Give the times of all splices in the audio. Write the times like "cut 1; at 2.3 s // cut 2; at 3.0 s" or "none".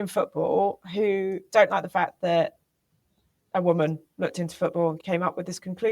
cut 1; at 5.0 s

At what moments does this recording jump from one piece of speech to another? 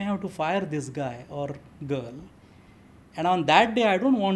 none

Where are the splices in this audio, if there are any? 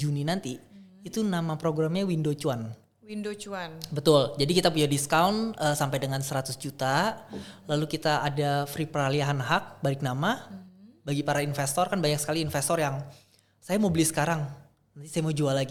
none

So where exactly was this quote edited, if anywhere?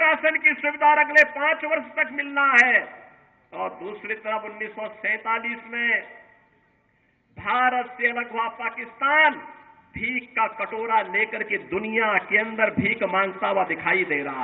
none

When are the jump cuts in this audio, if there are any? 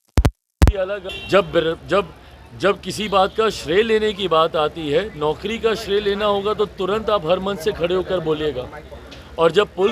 cut 1; at 1.1 s

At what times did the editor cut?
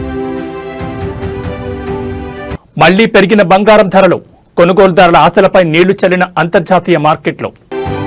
none

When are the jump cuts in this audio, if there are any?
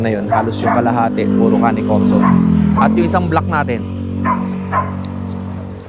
none

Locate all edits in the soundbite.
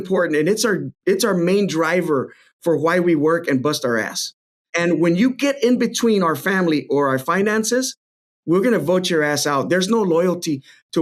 none

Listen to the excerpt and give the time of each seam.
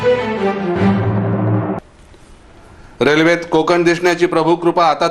cut 1; at 1.7 s

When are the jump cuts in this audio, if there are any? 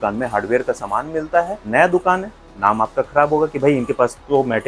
cut 1; at 1.6 s

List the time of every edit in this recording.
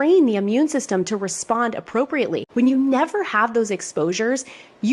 cut 1; at 2.5 s

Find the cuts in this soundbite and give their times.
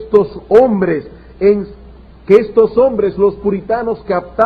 cut 1; at 3.0 s

